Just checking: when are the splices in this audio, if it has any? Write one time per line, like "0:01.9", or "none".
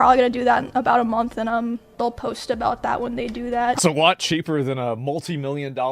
0:03.8

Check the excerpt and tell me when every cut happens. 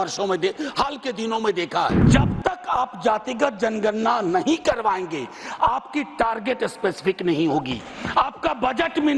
0:02.1

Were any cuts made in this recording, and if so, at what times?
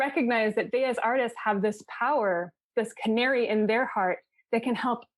none

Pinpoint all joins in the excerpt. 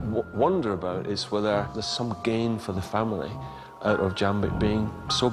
0:01.8

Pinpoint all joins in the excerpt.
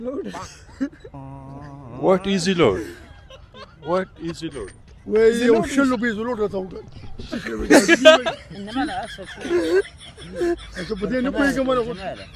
none

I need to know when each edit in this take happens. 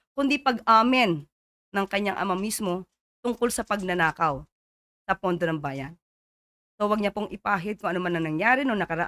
none

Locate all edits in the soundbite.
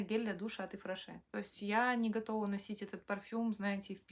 0:01.2

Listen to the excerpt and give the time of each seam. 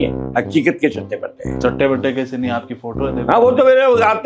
none

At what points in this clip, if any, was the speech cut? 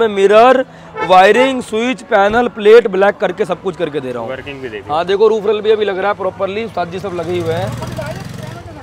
none

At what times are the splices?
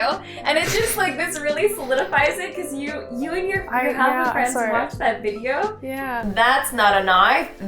0:06.2

